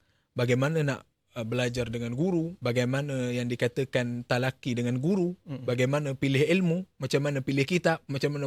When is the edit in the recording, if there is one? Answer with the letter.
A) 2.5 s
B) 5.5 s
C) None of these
A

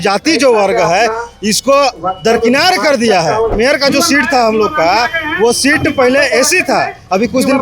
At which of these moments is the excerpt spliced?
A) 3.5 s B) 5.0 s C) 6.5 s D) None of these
A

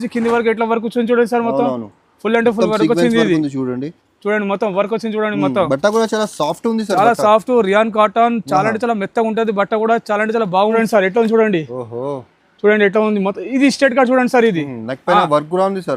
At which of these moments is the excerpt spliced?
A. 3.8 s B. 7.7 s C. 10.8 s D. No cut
C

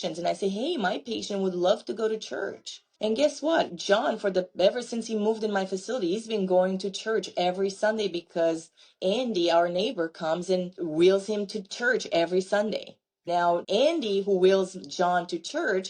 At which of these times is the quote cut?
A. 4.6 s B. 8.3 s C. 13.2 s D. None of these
C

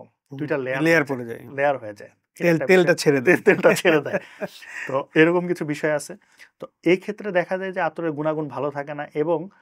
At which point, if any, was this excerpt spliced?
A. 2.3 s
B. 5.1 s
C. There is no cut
C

